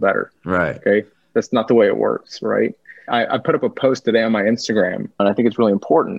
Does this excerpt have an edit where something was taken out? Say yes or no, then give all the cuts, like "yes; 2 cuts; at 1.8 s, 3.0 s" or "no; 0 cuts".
yes; 1 cut; at 3.0 s